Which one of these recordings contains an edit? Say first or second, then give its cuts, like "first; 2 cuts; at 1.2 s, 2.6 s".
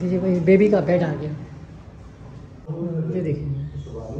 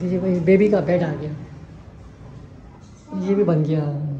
first; 1 cut; at 2.7 s